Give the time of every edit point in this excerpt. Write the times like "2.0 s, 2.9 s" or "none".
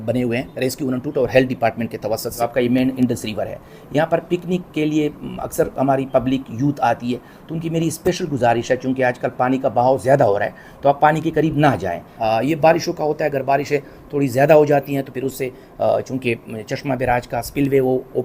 2.4 s, 12.1 s